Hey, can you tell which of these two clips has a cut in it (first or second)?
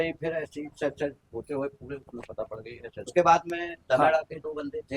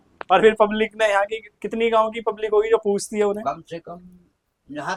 first